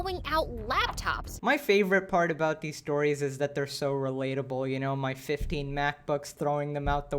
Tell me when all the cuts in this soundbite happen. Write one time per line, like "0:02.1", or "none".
0:01.2

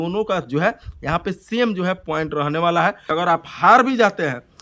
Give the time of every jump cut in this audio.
0:03.1

